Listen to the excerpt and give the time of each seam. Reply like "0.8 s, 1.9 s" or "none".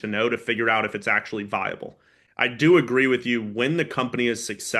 2.2 s

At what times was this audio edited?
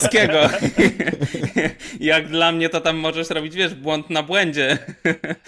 none

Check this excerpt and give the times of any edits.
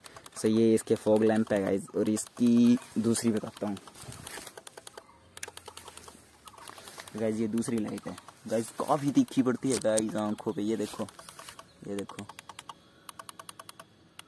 none

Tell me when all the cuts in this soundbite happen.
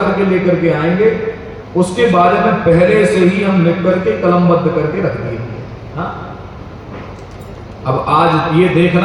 none

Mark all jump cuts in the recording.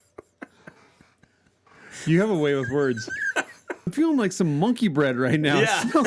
3.9 s

